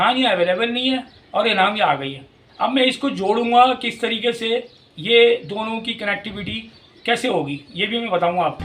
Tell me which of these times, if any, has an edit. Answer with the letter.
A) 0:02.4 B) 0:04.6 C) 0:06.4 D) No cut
A